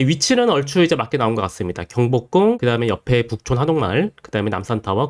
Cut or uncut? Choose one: uncut